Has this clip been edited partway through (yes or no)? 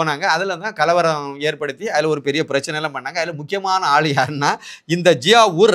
no